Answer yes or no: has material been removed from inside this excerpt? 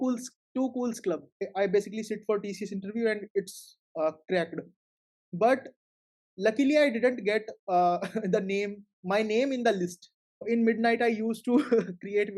yes